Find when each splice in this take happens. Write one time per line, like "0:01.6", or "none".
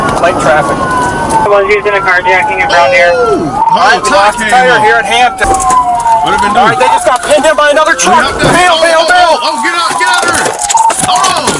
0:01.5
0:05.4